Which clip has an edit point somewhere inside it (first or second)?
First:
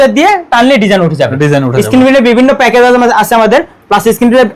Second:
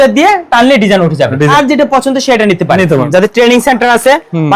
second